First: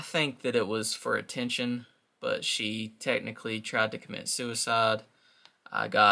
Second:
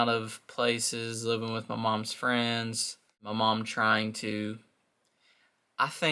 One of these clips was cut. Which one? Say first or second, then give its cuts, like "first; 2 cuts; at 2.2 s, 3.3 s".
second; 1 cut; at 3.3 s